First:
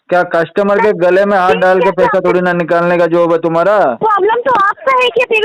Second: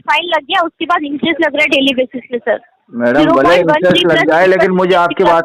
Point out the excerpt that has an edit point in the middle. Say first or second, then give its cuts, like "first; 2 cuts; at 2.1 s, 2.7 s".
first; 1 cut; at 4.0 s